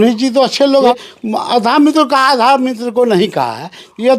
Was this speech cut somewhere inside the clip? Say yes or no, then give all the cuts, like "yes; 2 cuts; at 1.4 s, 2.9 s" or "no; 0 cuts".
yes; 1 cut; at 0.9 s